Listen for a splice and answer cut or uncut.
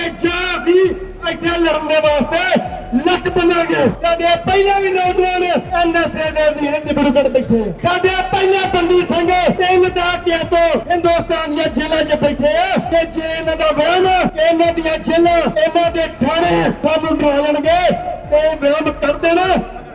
cut